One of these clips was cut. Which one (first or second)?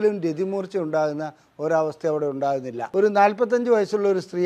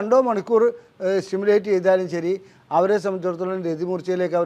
first